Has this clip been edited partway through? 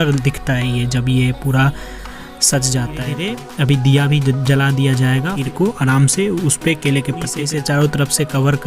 yes; 3 cuts; at 3.2 s, 5.3 s, 7.4 s

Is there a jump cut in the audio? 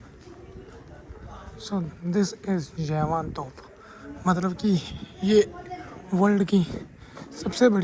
no; 0 cuts

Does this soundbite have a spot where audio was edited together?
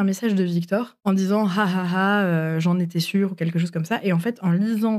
yes; 1 cut; at 0.9 s

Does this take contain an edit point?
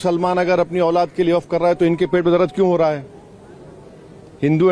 no; 0 cuts

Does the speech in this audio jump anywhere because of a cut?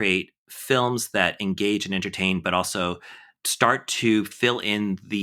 no; 0 cuts

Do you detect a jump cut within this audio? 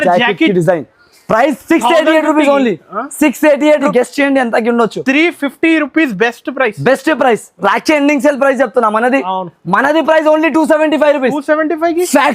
yes; 1 cut; at 3.9 s

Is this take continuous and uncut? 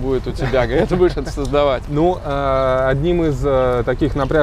yes; 0 cuts

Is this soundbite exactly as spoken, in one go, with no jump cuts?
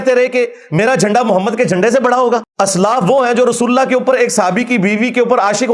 no; 1 cut; at 2.5 s

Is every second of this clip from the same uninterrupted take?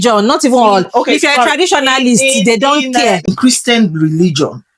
no; 1 cut; at 3.3 s

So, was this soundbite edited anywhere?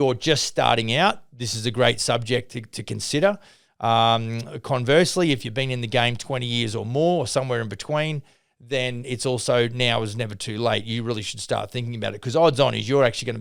no; 0 cuts

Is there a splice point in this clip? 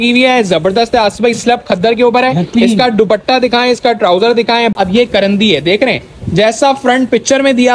yes; 1 cut; at 4.7 s

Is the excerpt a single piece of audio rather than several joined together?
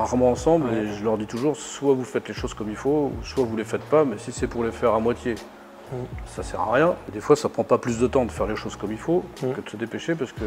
yes; 0 cuts

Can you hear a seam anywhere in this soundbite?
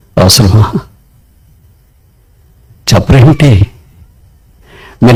no; 0 cuts

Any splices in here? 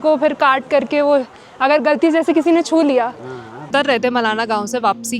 yes; 1 cut; at 3.7 s

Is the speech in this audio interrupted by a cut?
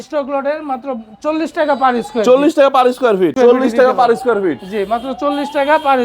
yes; 1 cut; at 3.3 s

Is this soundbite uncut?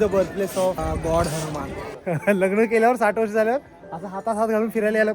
no; 2 cuts; at 0.8 s, 1.9 s

